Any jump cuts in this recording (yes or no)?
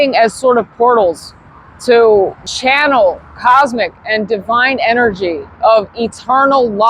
yes